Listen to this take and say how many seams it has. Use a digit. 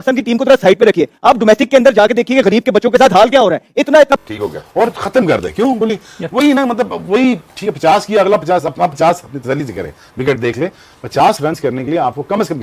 1